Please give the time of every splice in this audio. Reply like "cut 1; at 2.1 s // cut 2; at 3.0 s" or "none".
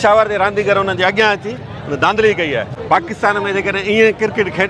cut 1; at 2.7 s